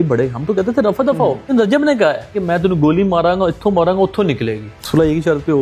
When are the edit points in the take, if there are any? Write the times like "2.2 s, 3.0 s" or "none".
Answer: 1.5 s, 4.7 s